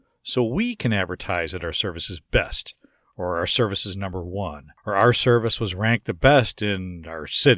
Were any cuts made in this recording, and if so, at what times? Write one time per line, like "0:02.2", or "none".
0:04.7

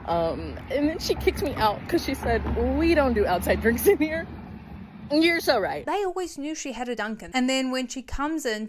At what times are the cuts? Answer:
0:05.8
0:07.2

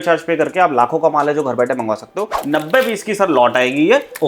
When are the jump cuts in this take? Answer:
0:02.2

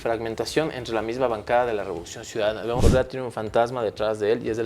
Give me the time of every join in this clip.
0:02.8

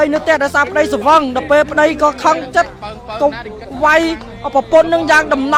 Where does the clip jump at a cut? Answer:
none

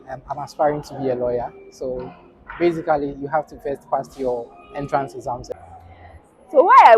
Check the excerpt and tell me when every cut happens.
0:05.5

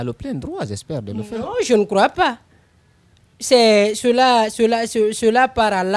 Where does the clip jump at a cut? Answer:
none

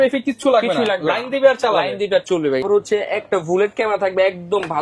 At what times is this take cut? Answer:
0:02.6

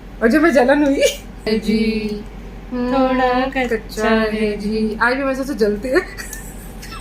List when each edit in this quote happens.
0:01.5

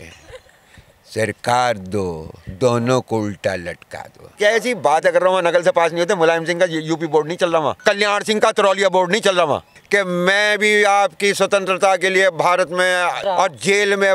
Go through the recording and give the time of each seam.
0:04.3
0:07.8
0:09.7
0:13.2

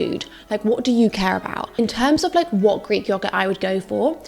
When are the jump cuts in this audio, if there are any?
0:01.6

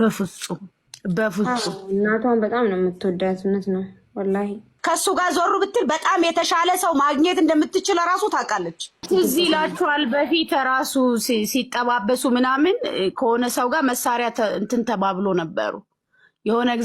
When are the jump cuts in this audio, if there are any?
0:04.7
0:08.9

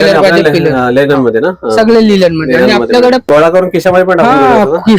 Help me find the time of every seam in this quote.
0:03.4

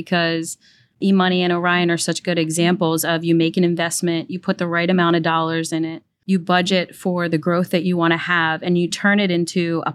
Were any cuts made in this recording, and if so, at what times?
0:01.0

